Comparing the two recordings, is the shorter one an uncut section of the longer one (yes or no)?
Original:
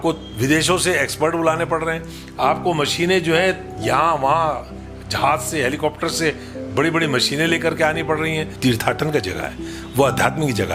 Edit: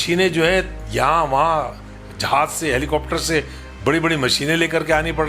yes